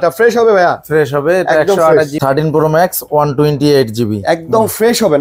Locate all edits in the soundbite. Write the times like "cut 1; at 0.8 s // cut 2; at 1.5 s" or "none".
cut 1; at 2.1 s